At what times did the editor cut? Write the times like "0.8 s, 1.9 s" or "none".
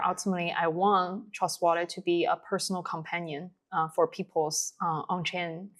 none